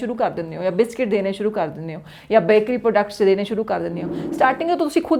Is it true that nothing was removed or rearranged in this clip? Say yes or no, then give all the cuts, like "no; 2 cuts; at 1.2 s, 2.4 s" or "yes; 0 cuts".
yes; 0 cuts